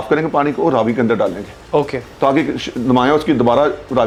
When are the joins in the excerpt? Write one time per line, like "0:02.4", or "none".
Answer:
none